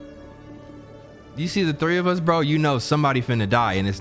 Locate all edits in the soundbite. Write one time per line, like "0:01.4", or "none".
0:01.1